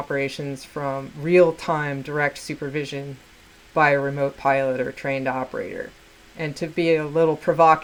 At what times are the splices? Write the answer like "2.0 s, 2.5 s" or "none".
none

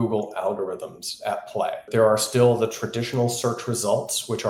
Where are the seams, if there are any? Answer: 1.9 s

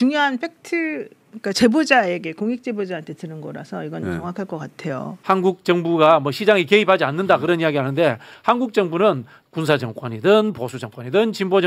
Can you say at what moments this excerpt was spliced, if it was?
5.1 s

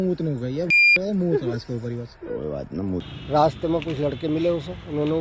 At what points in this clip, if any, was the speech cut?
3.2 s

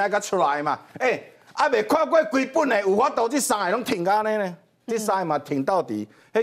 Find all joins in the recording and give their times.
none

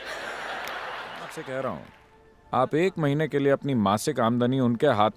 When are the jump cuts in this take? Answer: 1.3 s

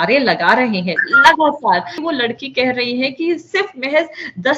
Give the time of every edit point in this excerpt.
2.0 s

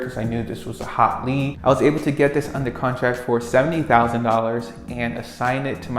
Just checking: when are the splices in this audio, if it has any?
1.6 s

